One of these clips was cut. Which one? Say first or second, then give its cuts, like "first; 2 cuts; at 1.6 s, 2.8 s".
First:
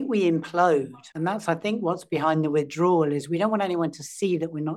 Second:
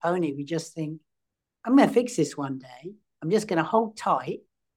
first; 1 cut; at 1.0 s